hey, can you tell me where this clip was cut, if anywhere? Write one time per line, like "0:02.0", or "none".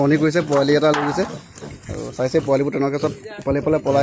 none